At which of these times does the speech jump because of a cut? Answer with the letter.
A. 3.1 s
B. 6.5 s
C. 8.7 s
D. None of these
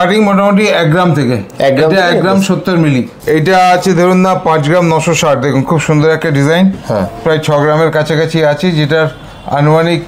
A